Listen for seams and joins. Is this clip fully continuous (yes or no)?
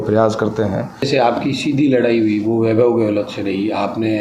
no